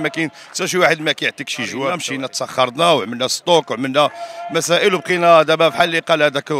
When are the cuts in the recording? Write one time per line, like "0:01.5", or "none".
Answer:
0:02.0